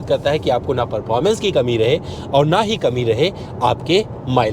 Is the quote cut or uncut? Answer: uncut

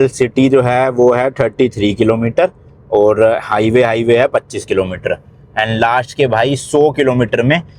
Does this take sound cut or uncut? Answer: uncut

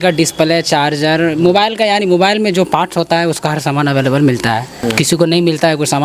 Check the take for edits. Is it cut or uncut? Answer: cut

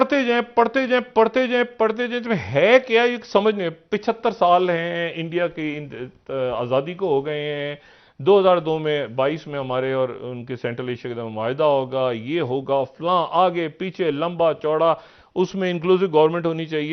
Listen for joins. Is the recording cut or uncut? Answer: uncut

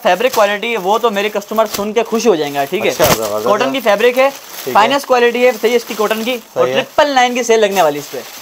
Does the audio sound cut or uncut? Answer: uncut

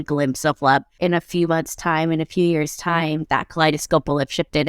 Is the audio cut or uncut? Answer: cut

